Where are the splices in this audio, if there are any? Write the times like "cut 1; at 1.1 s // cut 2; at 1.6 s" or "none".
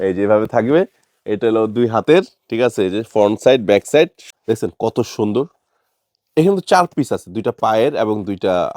cut 1; at 4.2 s